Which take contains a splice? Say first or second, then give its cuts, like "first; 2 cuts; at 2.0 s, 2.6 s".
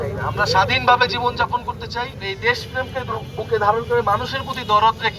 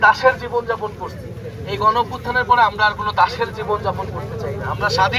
first; 1 cut; at 2.2 s